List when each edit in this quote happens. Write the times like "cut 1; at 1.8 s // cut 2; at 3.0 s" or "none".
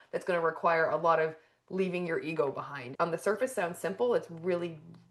cut 1; at 2.8 s